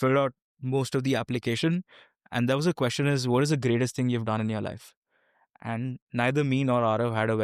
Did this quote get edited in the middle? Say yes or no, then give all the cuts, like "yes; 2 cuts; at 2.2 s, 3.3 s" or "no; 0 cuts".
no; 0 cuts